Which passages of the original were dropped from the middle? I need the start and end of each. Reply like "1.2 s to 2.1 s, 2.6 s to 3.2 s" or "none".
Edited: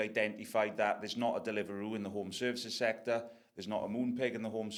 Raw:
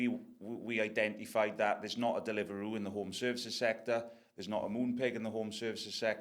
none